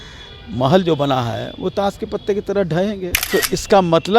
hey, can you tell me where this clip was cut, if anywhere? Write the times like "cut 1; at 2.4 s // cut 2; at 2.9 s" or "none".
cut 1; at 3.2 s

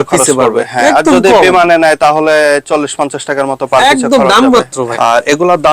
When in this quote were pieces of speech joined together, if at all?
cut 1; at 4.8 s

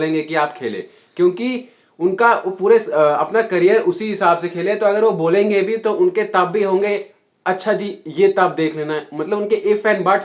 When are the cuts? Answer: none

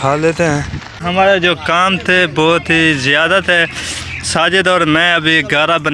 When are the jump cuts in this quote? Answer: cut 1; at 1.0 s

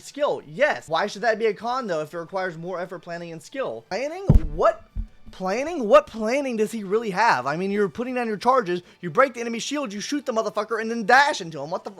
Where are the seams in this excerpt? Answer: cut 1; at 0.8 s // cut 2; at 3.8 s

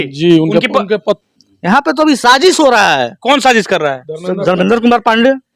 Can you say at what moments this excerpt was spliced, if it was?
cut 1; at 1.2 s

